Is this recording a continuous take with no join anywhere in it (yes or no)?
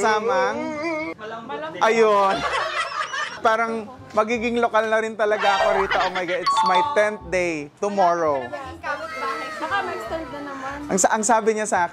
no